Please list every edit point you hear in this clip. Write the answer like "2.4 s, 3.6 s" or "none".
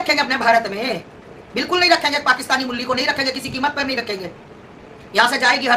none